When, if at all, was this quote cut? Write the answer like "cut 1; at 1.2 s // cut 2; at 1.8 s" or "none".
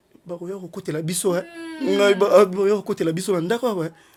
none